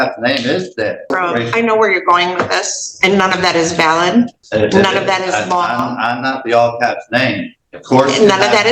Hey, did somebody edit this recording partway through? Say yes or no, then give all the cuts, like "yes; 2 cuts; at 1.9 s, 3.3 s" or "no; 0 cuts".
yes; 2 cuts; at 1.1 s, 4.4 s